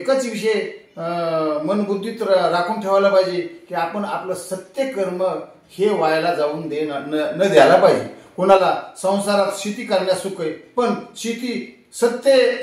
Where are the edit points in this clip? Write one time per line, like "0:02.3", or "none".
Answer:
none